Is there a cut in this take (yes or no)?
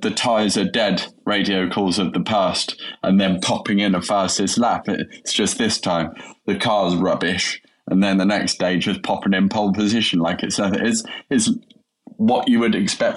no